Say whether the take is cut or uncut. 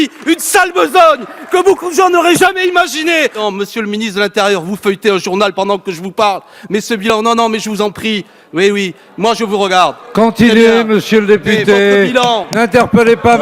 cut